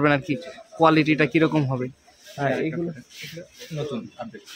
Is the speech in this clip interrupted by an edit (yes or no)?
no